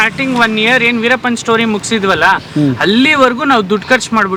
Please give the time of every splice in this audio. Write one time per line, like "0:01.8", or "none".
none